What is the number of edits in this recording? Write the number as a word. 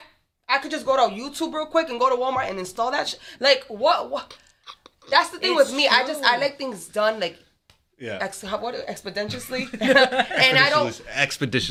zero